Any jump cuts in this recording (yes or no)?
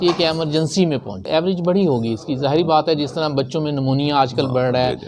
yes